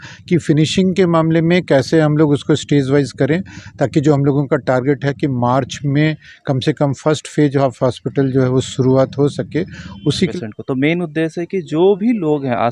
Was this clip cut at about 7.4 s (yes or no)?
no